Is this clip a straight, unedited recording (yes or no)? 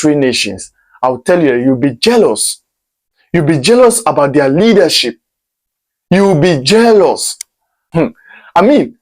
no